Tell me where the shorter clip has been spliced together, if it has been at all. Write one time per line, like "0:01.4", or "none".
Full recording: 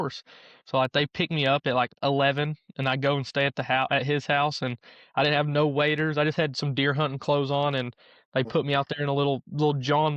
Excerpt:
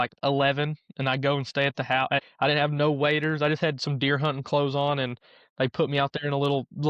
0:02.2